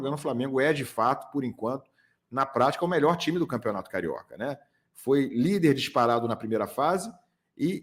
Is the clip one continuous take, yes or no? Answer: yes